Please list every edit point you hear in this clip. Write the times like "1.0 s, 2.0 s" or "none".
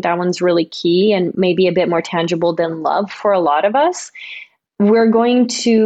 1.3 s